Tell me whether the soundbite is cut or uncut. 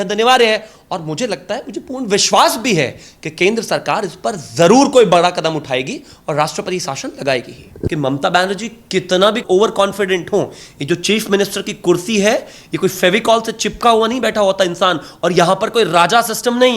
cut